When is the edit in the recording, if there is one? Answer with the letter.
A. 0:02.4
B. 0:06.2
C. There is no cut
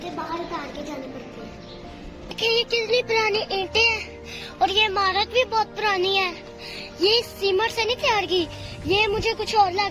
A